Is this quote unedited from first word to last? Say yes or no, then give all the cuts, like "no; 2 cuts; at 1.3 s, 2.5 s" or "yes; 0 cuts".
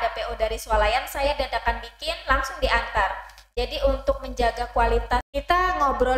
no; 1 cut; at 5.3 s